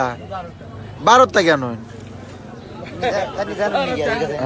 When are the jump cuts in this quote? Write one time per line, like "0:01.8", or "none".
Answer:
none

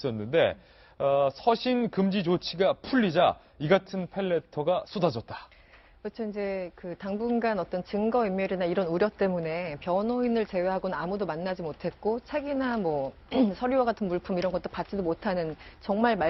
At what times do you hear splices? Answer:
0:10.8

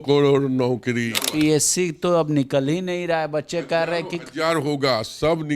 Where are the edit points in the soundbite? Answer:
0:01.2

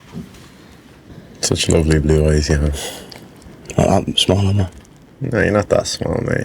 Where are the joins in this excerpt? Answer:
0:01.1

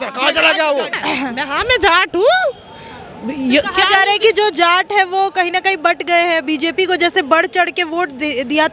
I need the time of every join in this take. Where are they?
0:00.9

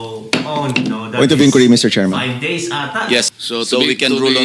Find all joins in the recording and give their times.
0:03.3

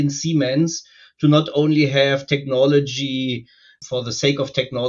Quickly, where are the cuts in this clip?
0:03.7

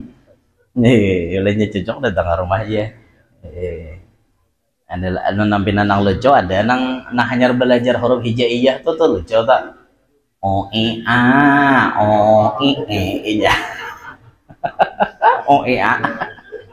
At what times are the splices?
none

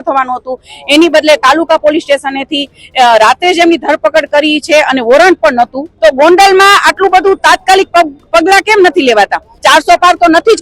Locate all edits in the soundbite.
0:05.8
0:09.5

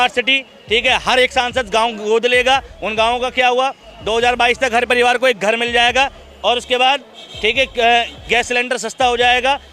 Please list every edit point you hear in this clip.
0:06.2

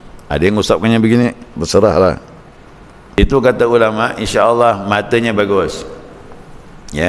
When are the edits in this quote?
0:03.2

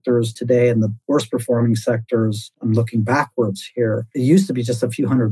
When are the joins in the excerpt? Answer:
0:01.0
0:02.5
0:04.1

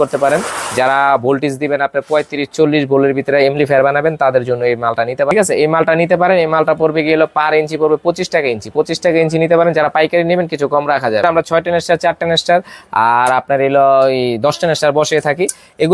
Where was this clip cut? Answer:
0:05.3
0:11.2

